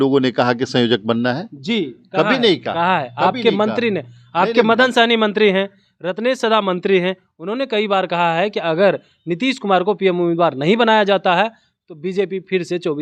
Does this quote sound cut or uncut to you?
uncut